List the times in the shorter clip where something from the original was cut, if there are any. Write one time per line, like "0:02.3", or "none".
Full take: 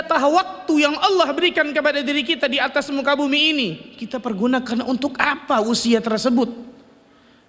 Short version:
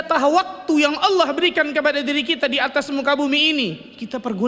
none